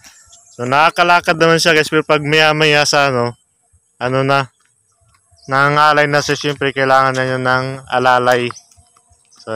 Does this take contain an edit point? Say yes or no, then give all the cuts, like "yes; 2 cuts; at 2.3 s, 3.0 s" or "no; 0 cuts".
no; 0 cuts